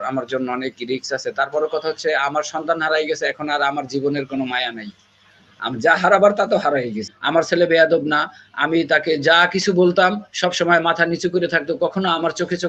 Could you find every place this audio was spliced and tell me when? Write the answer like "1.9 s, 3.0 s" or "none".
7.1 s